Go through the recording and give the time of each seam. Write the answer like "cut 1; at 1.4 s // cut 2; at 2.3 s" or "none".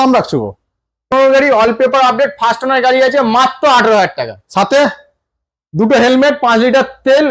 cut 1; at 1.1 s